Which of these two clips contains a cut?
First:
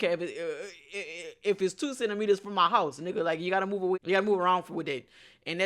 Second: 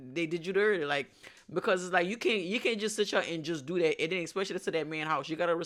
first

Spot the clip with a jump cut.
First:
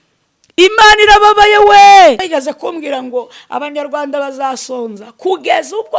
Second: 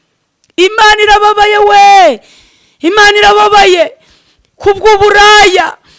first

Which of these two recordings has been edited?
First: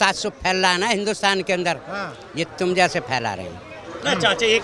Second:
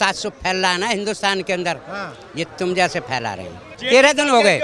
second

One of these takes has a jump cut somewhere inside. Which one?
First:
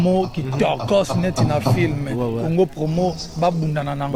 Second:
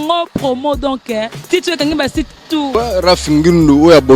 second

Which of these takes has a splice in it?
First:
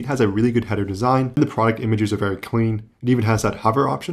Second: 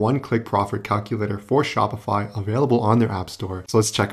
first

